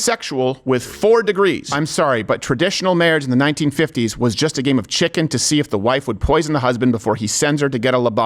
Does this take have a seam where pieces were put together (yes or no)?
yes